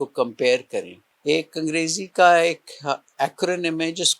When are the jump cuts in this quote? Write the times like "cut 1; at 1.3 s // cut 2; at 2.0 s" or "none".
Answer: cut 1; at 1.1 s